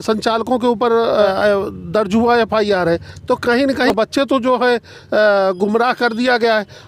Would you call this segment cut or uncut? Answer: cut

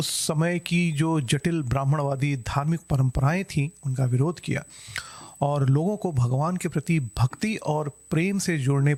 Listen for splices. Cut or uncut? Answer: uncut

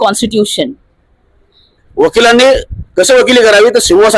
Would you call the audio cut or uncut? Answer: cut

